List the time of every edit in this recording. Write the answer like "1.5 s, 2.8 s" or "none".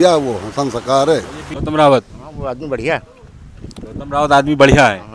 1.4 s